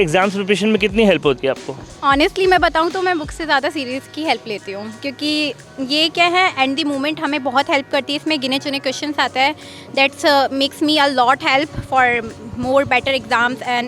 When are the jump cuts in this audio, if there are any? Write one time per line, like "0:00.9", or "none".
none

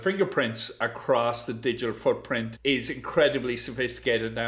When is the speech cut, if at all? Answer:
0:02.5

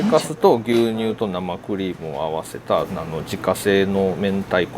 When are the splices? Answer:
0:03.0

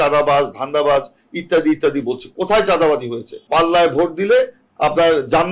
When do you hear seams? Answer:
0:03.4

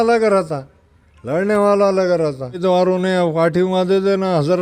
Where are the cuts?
0:02.6

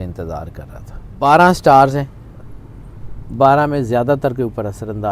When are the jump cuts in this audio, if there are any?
0:01.1

